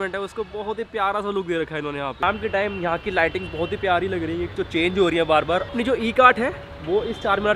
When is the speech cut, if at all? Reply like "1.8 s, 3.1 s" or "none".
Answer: 2.2 s, 5.7 s